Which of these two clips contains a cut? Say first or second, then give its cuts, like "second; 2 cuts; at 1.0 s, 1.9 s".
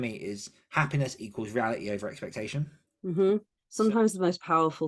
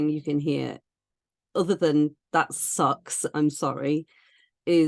first; 1 cut; at 3.6 s